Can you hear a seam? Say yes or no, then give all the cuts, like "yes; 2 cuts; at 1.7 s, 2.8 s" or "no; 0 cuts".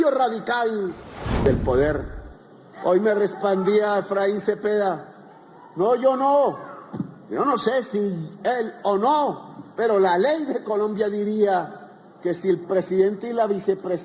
yes; 1 cut; at 1.5 s